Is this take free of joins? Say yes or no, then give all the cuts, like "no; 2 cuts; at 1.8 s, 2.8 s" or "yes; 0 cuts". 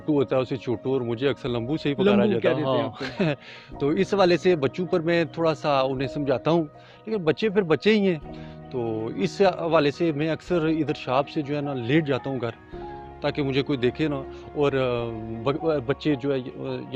yes; 0 cuts